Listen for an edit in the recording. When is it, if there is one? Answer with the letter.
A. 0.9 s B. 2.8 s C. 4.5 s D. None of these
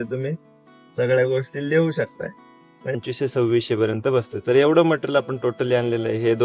B